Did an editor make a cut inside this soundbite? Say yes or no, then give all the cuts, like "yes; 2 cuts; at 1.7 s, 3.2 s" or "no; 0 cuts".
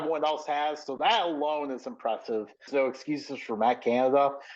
yes; 1 cut; at 2.7 s